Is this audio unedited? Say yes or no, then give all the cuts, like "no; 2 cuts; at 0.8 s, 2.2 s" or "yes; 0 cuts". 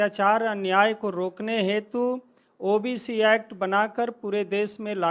yes; 0 cuts